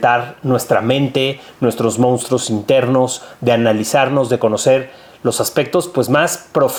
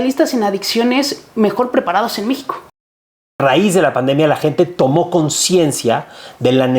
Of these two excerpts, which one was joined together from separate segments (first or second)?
second